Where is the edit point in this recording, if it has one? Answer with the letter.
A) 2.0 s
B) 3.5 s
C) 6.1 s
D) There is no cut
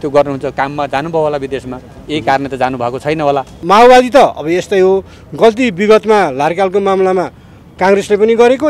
B